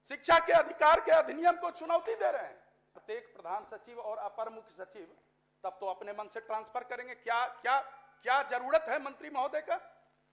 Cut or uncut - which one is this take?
cut